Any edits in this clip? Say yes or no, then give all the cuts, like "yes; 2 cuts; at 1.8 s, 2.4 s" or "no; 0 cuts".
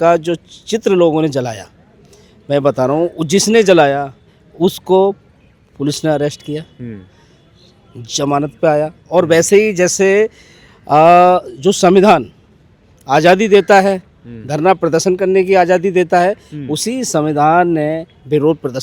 no; 0 cuts